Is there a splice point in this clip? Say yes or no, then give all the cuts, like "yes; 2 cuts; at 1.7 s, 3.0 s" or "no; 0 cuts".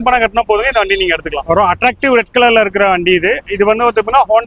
no; 0 cuts